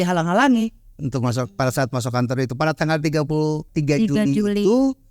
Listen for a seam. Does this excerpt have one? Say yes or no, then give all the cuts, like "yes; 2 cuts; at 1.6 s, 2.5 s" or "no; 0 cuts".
yes; 1 cut; at 3.6 s